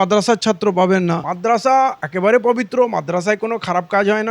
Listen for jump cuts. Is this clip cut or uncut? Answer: cut